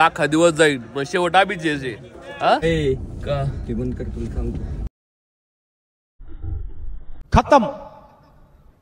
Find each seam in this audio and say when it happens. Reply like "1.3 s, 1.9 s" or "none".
2.6 s